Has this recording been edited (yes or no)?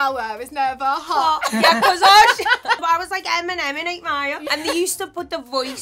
yes